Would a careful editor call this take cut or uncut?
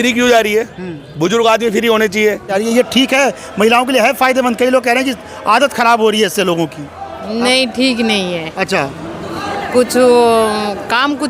cut